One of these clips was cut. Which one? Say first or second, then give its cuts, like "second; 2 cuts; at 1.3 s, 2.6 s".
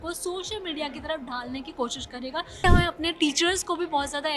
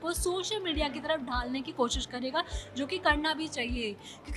first; 1 cut; at 2.6 s